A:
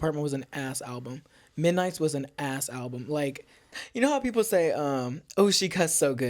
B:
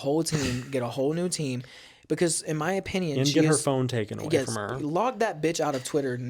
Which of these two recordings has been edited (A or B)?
A